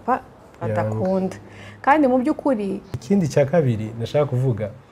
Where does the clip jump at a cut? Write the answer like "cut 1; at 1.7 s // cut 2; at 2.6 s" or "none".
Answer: cut 1; at 2.9 s